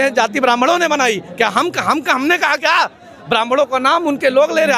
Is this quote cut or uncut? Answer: uncut